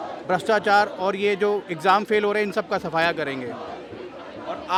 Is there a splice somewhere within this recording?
no; 0 cuts

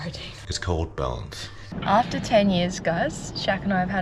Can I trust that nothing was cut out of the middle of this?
no; 1 cut; at 1.7 s

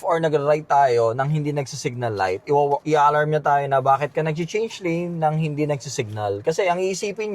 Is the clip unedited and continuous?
no; 1 cut; at 2.8 s

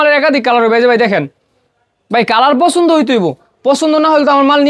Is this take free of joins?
yes; 0 cuts

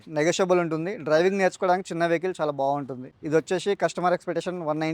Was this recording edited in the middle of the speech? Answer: yes; 1 cut; at 3.1 s

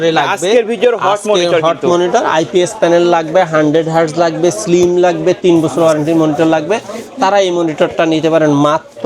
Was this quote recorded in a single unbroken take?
yes; 0 cuts

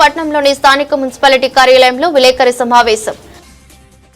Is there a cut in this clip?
no; 0 cuts

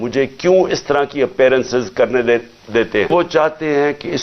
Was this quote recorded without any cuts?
no; 1 cut; at 3.1 s

